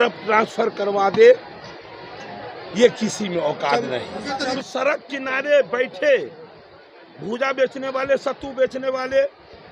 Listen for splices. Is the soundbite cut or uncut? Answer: cut